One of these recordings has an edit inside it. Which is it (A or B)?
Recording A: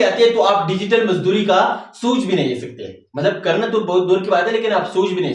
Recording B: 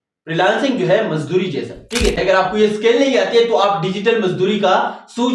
B